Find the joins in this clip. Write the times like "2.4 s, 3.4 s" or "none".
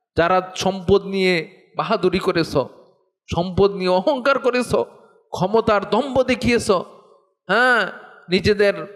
none